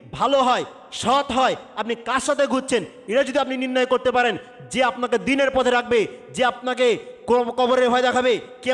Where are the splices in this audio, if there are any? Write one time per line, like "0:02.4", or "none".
none